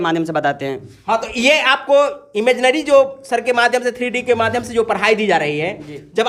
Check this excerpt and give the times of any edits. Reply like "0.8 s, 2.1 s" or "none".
none